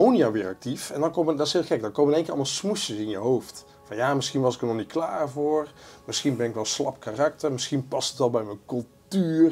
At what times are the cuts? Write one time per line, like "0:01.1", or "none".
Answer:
none